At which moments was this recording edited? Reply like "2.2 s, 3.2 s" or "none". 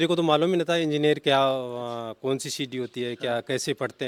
none